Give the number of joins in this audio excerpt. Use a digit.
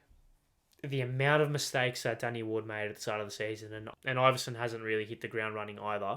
1